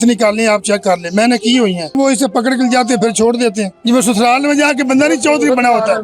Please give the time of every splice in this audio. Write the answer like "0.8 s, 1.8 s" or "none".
1.9 s, 3.7 s